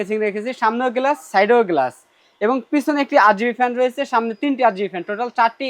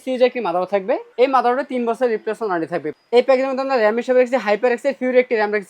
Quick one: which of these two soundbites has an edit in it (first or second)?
second